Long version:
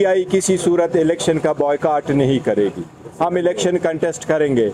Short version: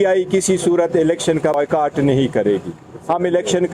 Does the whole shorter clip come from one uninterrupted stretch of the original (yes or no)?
no